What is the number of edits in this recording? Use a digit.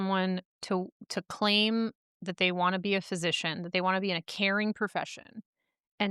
0